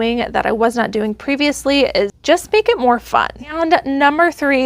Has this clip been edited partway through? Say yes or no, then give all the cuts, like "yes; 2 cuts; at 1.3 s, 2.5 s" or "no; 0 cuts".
yes; 1 cut; at 3.4 s